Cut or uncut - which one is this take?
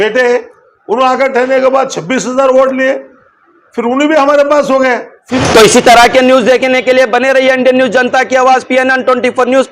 cut